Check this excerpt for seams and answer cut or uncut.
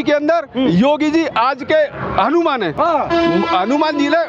uncut